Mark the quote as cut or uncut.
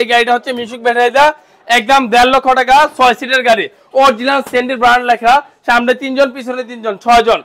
uncut